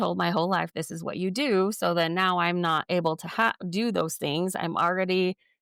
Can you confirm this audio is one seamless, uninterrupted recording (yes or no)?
yes